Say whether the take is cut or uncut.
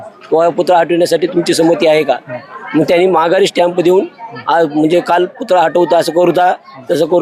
uncut